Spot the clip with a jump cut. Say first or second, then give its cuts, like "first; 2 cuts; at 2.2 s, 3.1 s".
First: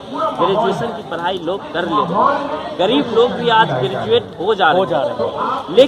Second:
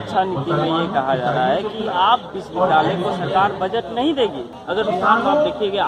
second; 1 cut; at 4.5 s